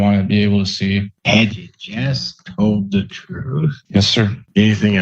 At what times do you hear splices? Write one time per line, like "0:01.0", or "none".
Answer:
0:01.1
0:03.8